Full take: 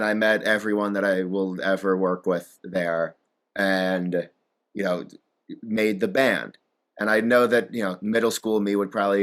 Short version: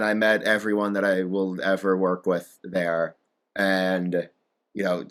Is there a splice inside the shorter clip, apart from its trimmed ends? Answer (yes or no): no